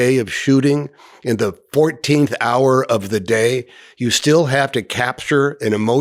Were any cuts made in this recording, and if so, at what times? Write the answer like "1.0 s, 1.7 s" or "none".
none